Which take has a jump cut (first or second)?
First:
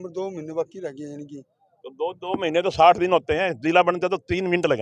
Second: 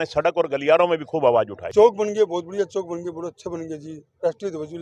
second